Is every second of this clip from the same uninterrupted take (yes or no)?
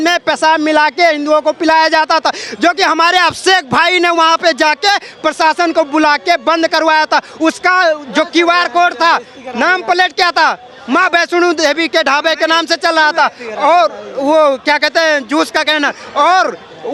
yes